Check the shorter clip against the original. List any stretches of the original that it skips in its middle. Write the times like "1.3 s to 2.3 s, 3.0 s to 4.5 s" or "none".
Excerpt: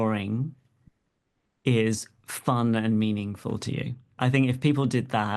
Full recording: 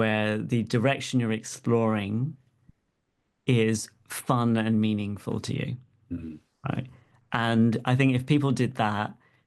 6.0 s to 7.8 s